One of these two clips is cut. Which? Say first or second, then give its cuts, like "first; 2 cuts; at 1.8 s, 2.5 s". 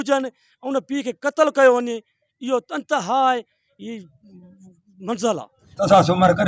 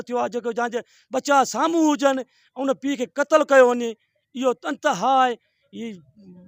first; 1 cut; at 5.6 s